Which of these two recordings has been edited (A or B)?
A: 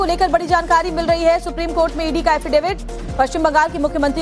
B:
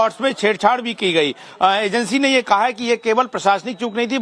A